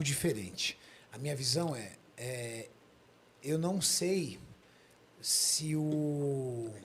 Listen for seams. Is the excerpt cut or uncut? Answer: uncut